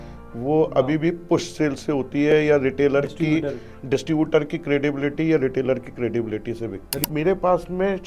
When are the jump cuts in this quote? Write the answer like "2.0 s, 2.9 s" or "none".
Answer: 7.0 s